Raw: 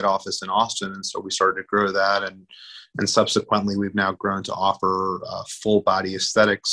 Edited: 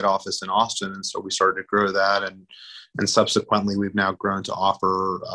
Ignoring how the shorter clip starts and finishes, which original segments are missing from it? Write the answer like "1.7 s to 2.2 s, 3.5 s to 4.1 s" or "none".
none